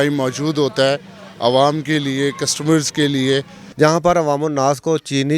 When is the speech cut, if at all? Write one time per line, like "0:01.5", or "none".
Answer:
0:03.6

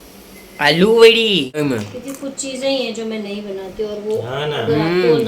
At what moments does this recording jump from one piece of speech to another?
0:01.5

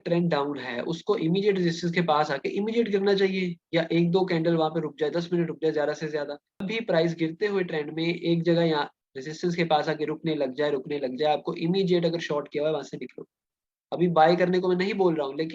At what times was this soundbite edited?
0:06.6

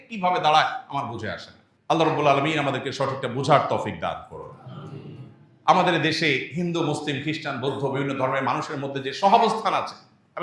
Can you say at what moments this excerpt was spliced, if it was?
none

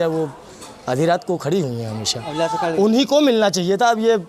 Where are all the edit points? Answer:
none

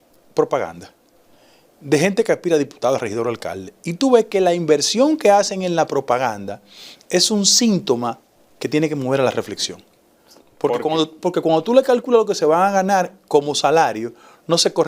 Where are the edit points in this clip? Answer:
none

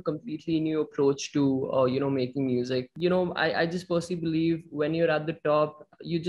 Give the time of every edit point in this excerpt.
0:02.9

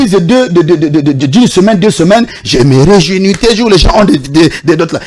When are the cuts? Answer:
none

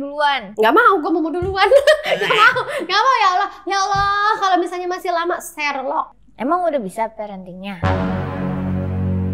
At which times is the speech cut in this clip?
0:06.2

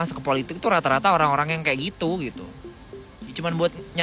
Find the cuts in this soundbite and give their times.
none

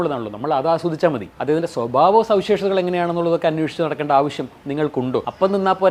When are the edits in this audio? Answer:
none

